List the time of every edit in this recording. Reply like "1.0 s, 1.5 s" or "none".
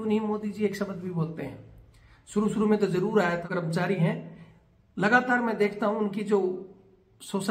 3.5 s